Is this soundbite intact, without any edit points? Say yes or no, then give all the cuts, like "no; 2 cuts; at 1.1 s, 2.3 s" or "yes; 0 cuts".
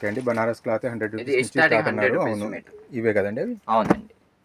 yes; 0 cuts